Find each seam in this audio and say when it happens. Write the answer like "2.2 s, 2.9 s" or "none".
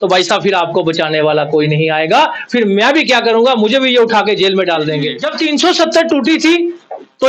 5.2 s